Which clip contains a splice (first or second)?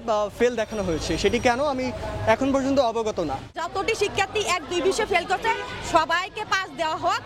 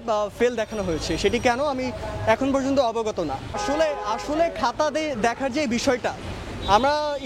first